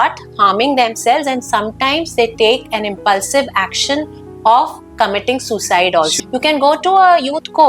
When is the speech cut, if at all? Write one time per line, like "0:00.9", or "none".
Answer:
0:06.2